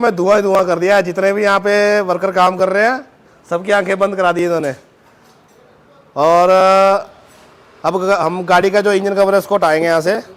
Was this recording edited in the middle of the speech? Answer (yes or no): no